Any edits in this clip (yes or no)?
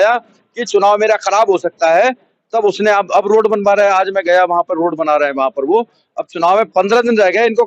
no